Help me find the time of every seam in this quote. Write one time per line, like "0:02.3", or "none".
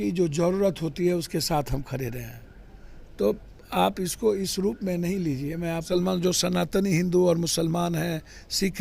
0:05.8